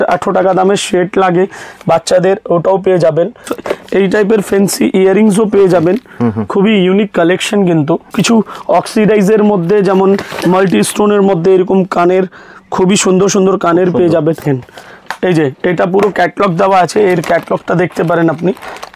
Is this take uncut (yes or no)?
no